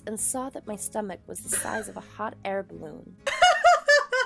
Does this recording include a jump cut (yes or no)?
yes